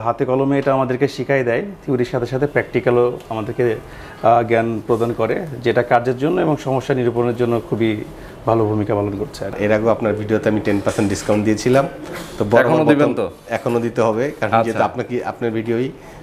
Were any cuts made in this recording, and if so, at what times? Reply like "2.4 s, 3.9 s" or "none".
9.5 s